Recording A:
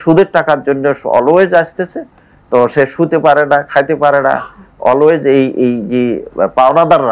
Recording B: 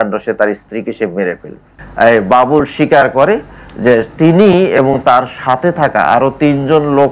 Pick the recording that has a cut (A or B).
B